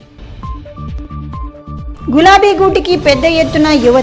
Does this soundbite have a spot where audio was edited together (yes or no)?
yes